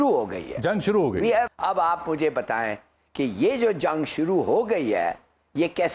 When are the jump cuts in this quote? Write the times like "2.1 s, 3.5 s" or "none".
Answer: 1.5 s